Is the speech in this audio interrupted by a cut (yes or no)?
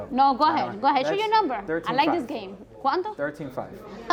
no